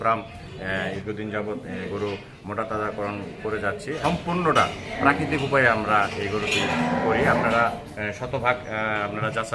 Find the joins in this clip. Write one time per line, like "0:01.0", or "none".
0:01.0
0:04.0